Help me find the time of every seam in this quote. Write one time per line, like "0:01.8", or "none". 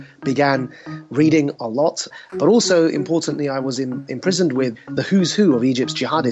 0:02.2
0:04.8